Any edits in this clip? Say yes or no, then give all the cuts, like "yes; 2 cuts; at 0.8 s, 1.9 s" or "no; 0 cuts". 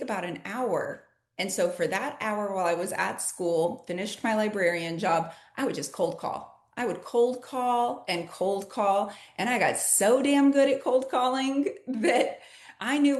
no; 0 cuts